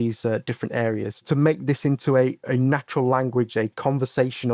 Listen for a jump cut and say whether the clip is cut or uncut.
cut